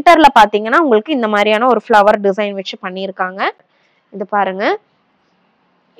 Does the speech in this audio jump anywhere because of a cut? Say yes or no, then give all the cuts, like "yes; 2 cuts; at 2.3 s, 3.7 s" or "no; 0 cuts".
yes; 1 cut; at 3.7 s